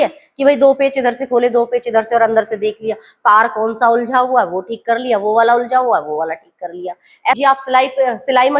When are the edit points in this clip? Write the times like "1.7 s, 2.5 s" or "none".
7.4 s